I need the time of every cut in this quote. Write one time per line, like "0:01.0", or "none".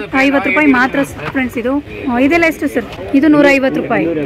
0:01.9
0:03.0